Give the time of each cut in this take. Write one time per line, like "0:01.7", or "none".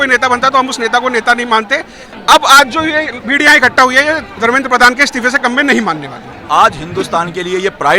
0:02.1
0:06.4